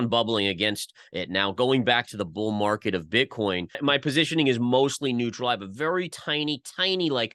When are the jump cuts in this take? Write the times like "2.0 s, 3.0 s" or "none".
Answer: 3.7 s